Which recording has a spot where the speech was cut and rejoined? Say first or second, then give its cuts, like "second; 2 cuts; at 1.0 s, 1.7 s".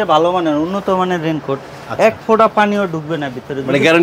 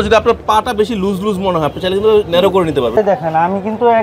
second; 1 cut; at 3.0 s